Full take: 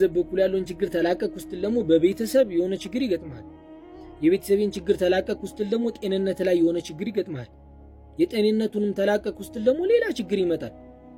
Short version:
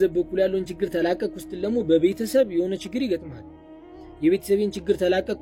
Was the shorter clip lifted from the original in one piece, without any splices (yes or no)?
yes